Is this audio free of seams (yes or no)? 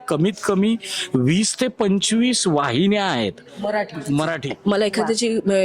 no